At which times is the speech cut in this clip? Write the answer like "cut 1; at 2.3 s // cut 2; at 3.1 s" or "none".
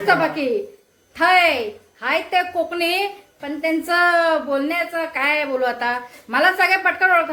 none